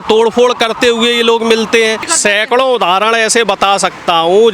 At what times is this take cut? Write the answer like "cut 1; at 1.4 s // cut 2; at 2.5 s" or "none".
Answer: cut 1; at 2.1 s